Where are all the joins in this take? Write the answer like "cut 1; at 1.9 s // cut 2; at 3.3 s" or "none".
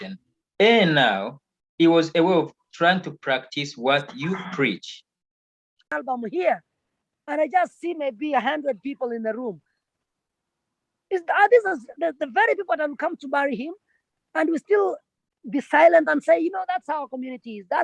cut 1; at 5.8 s